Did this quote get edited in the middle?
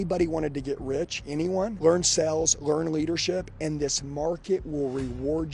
no; 0 cuts

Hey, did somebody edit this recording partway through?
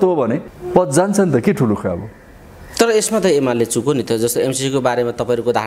no; 0 cuts

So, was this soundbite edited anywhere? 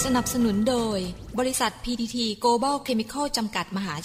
no; 0 cuts

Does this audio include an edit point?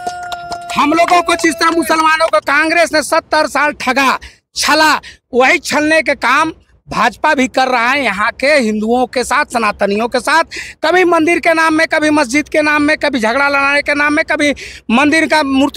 no; 0 cuts

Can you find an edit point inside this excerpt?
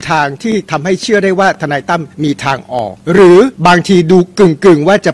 yes; 3 cuts; at 2.1 s, 3.0 s, 3.5 s

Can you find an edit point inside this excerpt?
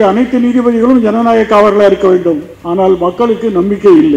yes; 1 cut; at 2.5 s

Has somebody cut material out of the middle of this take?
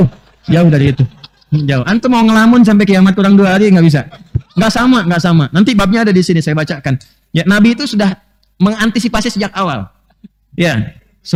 no; 0 cuts

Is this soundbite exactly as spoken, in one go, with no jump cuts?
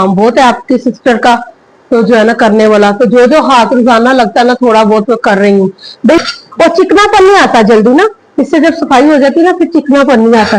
no; 1 cut; at 6.2 s

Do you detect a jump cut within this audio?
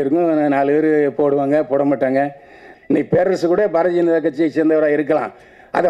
yes; 1 cut; at 2.7 s

